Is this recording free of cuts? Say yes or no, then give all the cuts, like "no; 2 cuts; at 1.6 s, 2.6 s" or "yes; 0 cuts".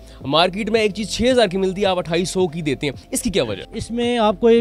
no; 1 cut; at 3.6 s